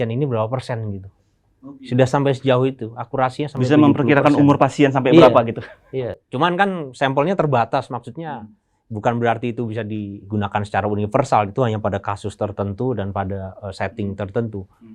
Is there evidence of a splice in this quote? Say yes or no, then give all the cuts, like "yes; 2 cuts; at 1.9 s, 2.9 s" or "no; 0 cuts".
no; 0 cuts